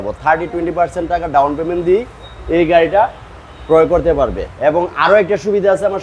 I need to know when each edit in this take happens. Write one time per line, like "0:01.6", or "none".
0:04.5